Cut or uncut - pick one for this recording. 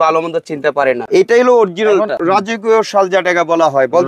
cut